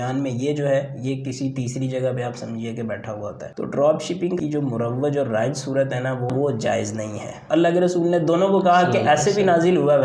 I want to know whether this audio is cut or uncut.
cut